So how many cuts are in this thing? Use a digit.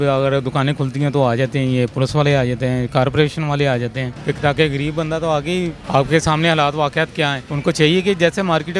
3